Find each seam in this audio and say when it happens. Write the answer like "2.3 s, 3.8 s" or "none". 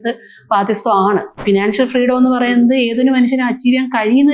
1.3 s